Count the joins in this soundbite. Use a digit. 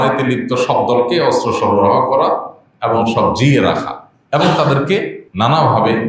1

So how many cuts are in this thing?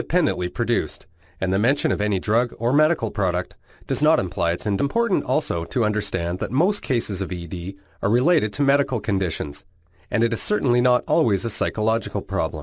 0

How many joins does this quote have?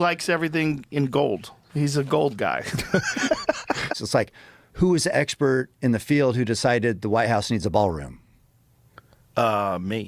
1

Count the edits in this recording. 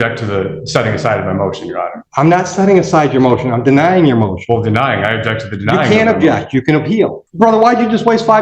2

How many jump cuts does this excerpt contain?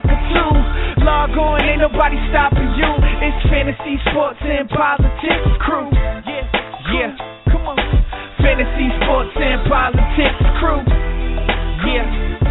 1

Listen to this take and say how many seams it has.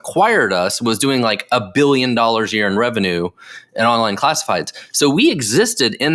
0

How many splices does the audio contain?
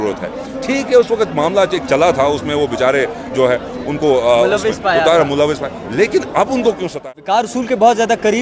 1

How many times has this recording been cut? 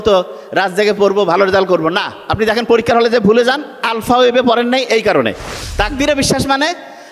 1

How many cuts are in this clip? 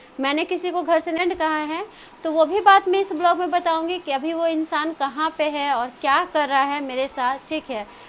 1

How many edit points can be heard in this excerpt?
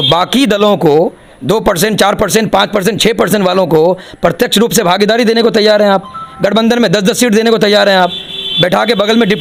0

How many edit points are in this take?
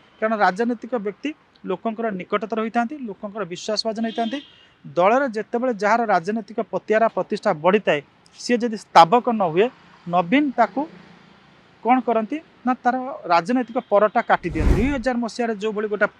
1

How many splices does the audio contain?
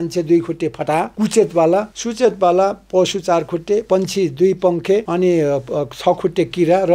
4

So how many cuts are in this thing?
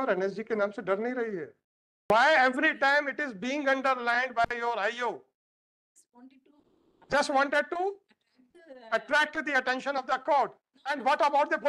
1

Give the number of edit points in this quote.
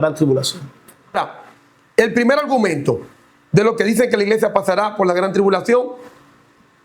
1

